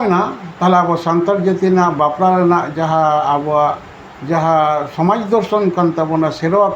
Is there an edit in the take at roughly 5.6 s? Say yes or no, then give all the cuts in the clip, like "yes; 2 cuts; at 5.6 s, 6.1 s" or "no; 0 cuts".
no; 0 cuts